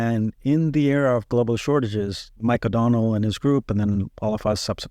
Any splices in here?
no; 0 cuts

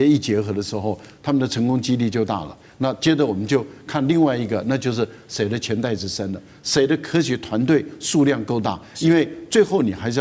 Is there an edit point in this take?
no; 0 cuts

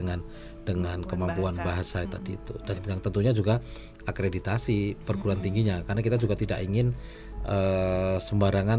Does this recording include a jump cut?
no; 0 cuts

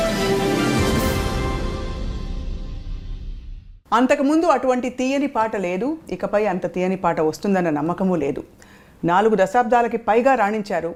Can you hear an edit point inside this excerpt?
no; 0 cuts

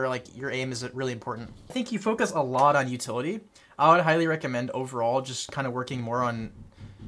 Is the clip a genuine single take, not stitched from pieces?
no; 1 cut; at 1.7 s

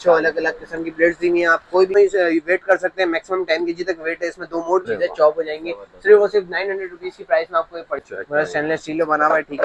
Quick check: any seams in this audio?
yes; 3 cuts; at 1.9 s, 4.8 s, 8.0 s

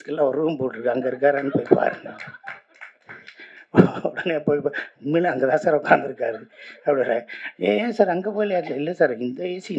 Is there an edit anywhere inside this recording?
no; 0 cuts

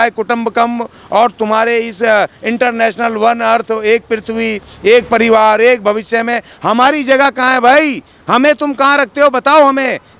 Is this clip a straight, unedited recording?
yes; 0 cuts

